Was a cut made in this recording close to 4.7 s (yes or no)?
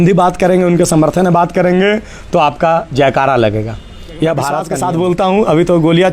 yes